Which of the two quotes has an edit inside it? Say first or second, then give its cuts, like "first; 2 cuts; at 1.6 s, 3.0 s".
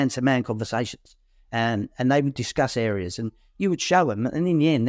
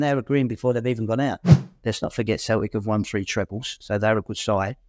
second; 1 cut; at 1.6 s